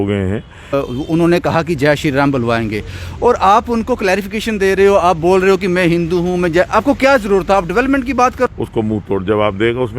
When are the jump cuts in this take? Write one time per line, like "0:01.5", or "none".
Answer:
0:00.7
0:08.5

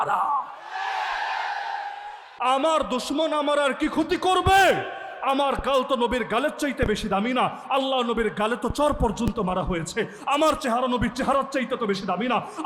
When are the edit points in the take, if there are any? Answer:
0:02.3

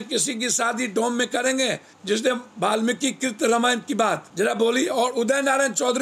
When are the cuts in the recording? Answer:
0:01.9
0:04.3

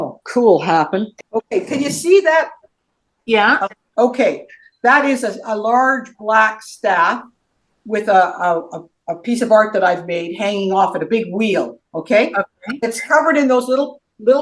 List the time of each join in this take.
0:01.2
0:02.6
0:03.8

